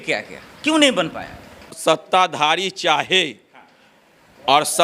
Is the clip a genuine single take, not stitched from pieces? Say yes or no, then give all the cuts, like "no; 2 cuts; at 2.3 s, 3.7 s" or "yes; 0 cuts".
no; 1 cut; at 1.7 s